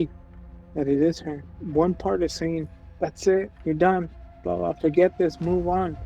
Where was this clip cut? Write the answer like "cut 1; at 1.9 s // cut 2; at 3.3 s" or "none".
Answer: cut 1; at 1.6 s